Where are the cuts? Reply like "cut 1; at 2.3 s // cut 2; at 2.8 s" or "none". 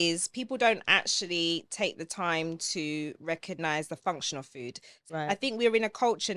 cut 1; at 5.0 s